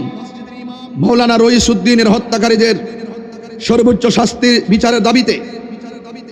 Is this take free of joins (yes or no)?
yes